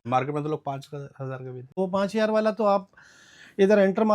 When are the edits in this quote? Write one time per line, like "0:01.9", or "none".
0:01.7